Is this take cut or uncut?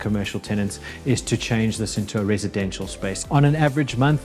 cut